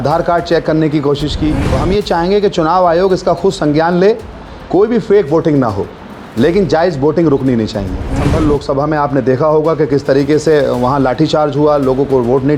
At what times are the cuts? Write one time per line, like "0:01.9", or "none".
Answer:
0:01.7
0:08.2